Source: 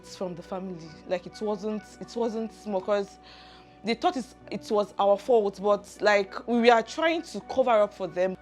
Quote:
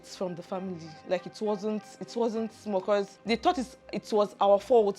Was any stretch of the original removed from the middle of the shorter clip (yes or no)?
yes